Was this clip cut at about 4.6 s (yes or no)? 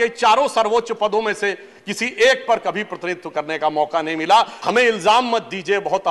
yes